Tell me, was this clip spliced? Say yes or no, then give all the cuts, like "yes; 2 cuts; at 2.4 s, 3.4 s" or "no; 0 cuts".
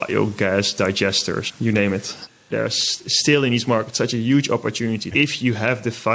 yes; 2 cuts; at 2.4 s, 5.1 s